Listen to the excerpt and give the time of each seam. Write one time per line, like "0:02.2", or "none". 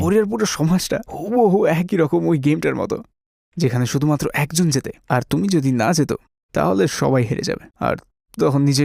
none